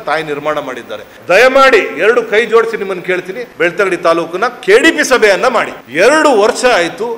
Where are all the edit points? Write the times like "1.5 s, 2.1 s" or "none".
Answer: 1.1 s, 3.4 s, 5.8 s

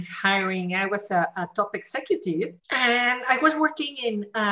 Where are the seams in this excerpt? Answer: 2.6 s

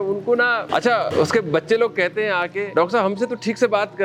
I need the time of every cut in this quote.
1.1 s, 2.6 s

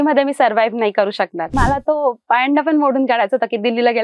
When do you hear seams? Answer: 1.5 s

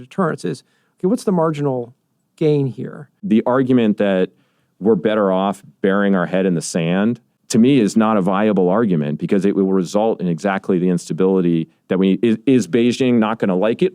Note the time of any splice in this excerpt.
3.2 s, 7.3 s

